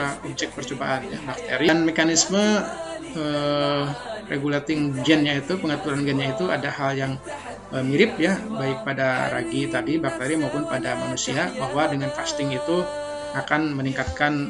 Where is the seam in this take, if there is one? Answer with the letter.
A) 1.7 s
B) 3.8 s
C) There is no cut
A